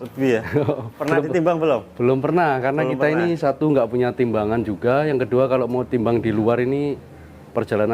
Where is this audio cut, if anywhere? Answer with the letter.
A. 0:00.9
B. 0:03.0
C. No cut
A